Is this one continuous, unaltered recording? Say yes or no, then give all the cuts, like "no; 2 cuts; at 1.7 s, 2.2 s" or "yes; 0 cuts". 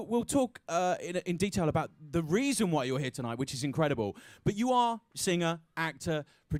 yes; 0 cuts